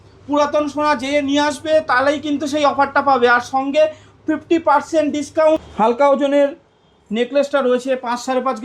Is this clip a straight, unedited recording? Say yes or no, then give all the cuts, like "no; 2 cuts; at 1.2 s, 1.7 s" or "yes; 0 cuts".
no; 1 cut; at 5.7 s